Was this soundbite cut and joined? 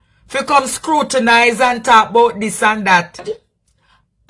yes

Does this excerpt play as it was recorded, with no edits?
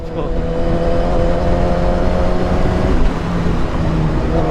yes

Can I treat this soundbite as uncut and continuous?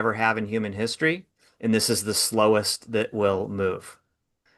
yes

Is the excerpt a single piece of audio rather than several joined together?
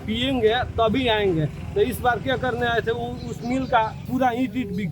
no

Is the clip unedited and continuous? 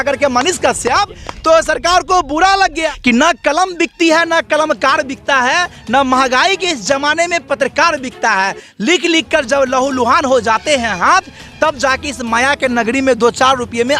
no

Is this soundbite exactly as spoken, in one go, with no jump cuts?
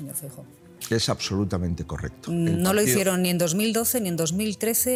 yes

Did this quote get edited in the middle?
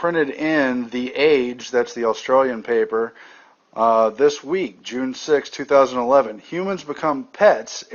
yes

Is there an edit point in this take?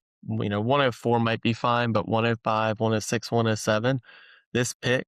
no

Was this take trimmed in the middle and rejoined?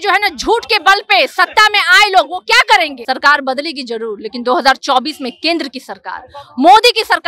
yes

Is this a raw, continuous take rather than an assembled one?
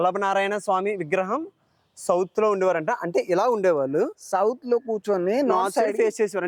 yes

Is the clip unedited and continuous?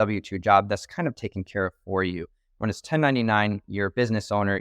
yes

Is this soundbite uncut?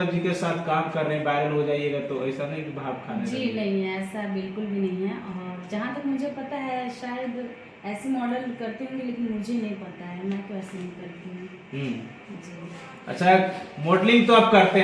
yes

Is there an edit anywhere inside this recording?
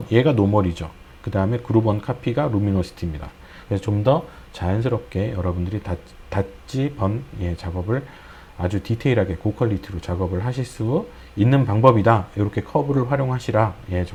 no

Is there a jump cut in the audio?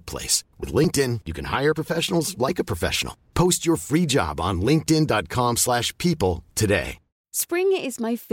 no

